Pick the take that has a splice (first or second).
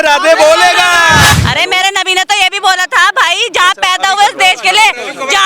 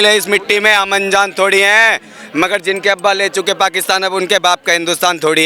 first